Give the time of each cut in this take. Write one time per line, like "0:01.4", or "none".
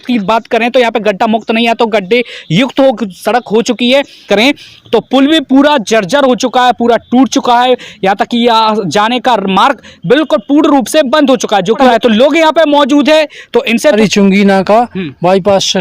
0:04.2
0:11.8
0:14.0